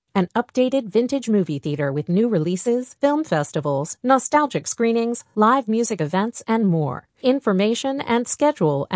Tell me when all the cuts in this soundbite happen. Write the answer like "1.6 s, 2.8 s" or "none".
none